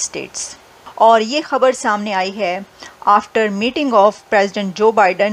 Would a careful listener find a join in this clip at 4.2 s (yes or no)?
no